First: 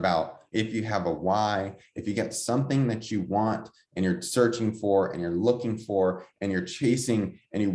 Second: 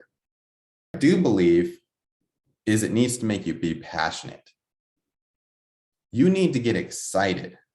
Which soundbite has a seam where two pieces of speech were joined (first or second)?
second